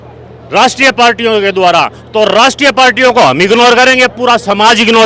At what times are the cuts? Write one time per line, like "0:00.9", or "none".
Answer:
none

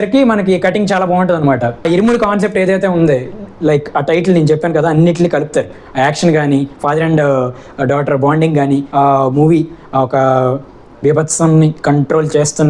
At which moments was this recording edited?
0:01.9
0:08.9

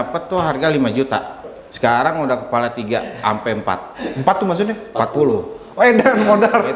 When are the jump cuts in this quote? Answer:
0:01.5

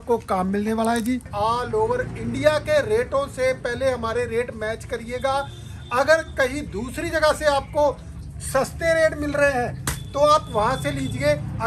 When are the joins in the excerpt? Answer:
0:01.3

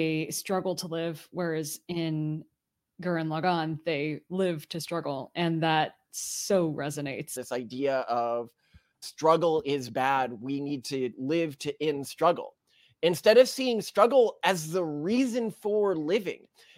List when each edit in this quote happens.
0:07.3

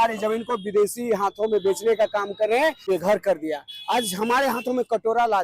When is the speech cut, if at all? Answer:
0:02.8

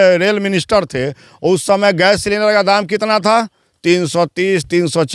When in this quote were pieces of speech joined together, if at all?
none

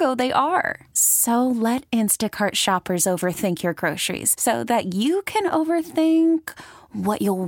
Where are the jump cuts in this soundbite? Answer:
none

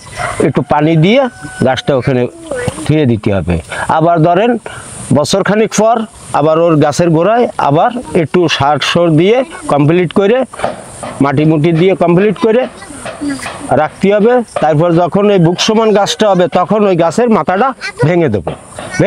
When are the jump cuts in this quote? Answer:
none

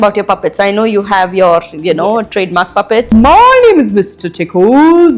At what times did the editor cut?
0:03.1

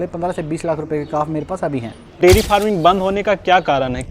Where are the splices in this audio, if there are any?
0:02.2

